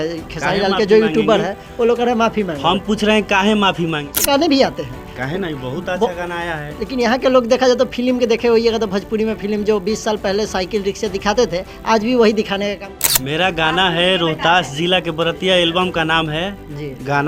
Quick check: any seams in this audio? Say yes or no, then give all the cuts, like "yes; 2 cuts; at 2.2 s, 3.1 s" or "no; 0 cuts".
yes; 2 cuts; at 4.1 s, 12.9 s